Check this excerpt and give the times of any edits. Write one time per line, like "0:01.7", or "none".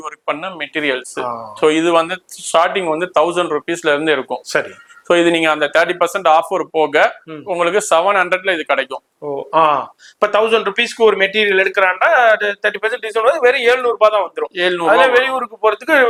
none